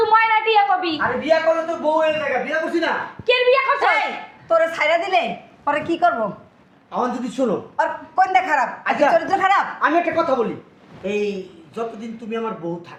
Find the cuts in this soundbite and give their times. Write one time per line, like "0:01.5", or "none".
none